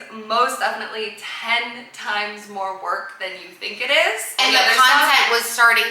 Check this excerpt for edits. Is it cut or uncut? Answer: cut